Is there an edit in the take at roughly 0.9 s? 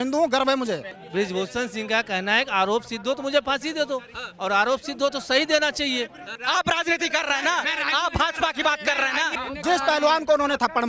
yes; 3 cuts; at 0.9 s, 6.3 s, 9.4 s

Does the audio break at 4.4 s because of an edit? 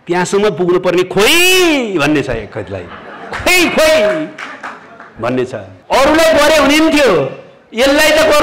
no; 1 cut; at 5.7 s

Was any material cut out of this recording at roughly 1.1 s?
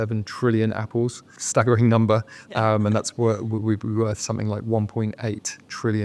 no; 0 cuts

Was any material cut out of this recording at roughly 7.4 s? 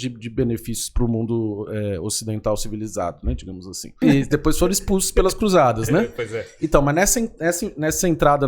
no; 1 cut; at 4.0 s

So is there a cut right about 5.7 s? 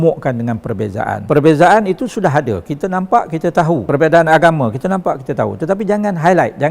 no; 2 cuts; at 1.2 s, 3.8 s

